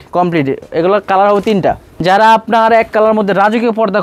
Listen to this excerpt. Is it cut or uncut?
cut